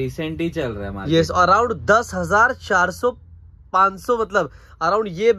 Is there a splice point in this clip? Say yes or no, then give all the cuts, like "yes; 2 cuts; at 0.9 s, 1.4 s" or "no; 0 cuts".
no; 0 cuts